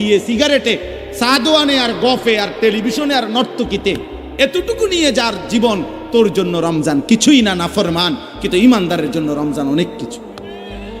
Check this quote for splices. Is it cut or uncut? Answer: cut